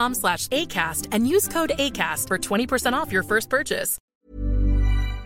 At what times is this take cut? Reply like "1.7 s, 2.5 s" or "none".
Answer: 4.0 s

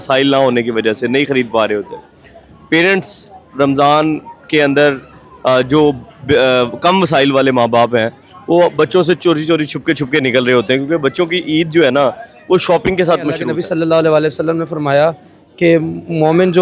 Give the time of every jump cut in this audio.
13.5 s

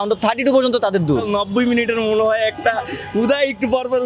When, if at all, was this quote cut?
1.4 s

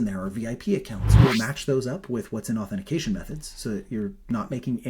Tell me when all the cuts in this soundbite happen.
1.1 s

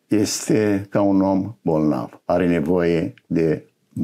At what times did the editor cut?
none

